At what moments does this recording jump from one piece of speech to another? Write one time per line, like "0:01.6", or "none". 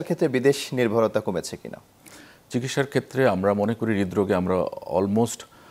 none